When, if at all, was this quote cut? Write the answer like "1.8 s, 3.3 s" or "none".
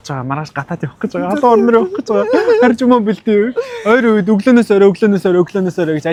none